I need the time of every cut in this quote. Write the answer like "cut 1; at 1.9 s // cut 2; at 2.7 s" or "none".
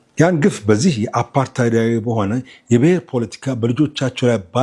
none